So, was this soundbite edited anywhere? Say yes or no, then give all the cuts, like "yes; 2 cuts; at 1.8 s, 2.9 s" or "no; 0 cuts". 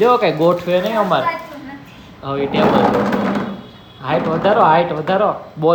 no; 0 cuts